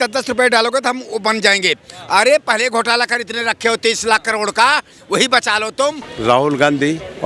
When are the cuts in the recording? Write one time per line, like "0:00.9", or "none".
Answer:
0:06.1